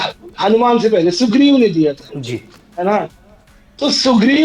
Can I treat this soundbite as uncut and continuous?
yes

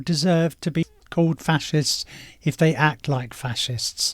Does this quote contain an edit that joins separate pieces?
yes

